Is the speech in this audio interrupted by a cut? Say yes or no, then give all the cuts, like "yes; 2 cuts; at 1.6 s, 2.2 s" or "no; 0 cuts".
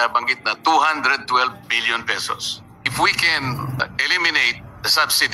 yes; 2 cuts; at 2.8 s, 3.8 s